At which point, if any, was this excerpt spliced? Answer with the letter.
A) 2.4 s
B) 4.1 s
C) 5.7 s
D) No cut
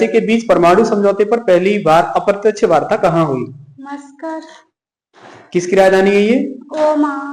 D